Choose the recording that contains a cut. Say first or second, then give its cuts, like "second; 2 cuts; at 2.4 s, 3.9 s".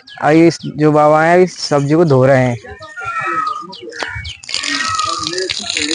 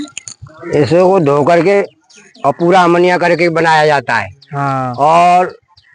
first; 1 cut; at 3.1 s